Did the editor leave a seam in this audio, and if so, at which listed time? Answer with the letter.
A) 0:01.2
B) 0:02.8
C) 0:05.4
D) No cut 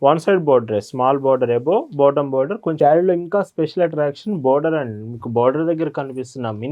B